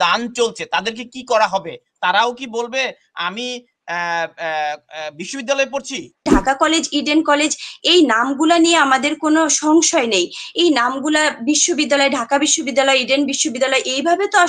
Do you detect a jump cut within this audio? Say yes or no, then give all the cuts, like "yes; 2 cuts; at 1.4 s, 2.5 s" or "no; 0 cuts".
yes; 1 cut; at 6.2 s